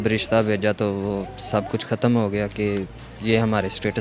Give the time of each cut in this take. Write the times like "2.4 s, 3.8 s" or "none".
none